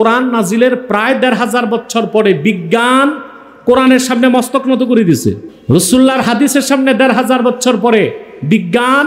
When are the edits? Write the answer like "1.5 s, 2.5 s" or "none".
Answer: 5.5 s